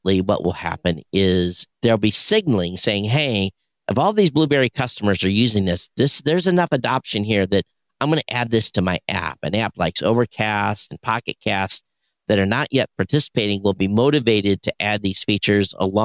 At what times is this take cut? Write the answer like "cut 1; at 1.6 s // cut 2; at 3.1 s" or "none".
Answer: cut 1; at 1.6 s

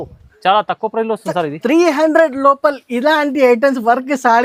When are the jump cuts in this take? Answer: none

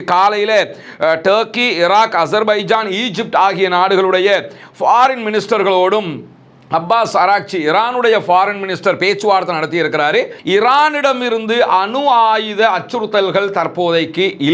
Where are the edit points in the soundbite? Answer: cut 1; at 10.4 s

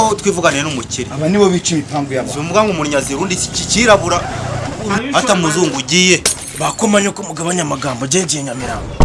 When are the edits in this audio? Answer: none

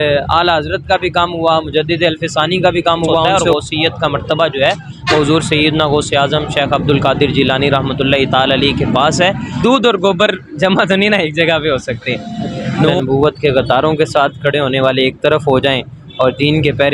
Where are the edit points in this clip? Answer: cut 1; at 3.4 s // cut 2; at 9.5 s // cut 3; at 12.9 s

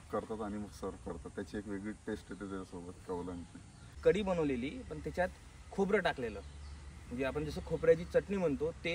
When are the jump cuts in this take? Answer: cut 1; at 3.8 s

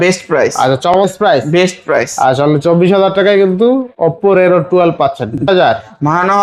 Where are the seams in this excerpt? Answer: cut 1; at 1.0 s // cut 2; at 5.4 s

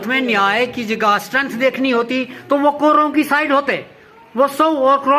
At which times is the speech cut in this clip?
none

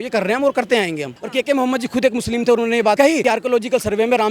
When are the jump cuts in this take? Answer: cut 1; at 1.2 s // cut 2; at 3.0 s

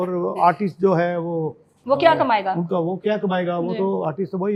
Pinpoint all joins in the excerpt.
none

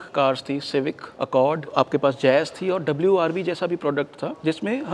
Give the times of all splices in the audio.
cut 1; at 1.7 s

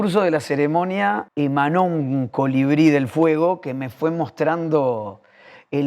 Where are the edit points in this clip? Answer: cut 1; at 1.3 s

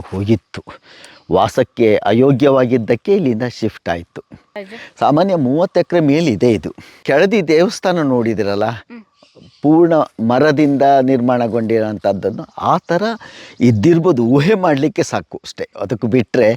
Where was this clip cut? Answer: cut 1; at 4.7 s // cut 2; at 7.0 s

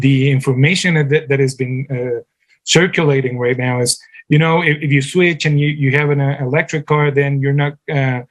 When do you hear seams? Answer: none

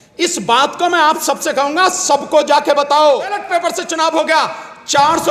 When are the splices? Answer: cut 1; at 3.4 s

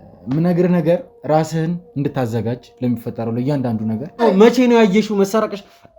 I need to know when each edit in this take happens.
cut 1; at 4.2 s

